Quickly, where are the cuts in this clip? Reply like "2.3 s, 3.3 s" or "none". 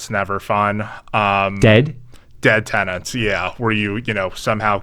none